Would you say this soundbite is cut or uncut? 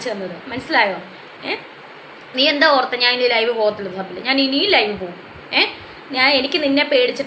cut